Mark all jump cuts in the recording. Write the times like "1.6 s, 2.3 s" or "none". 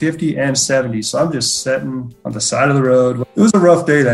2.2 s, 3.2 s